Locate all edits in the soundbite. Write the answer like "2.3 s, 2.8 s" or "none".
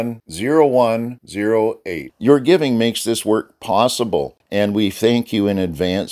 4.4 s